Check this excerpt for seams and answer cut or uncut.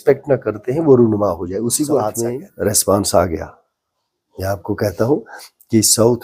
cut